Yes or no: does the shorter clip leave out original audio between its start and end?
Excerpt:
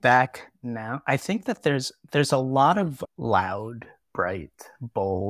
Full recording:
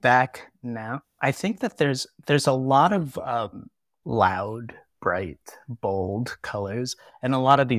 yes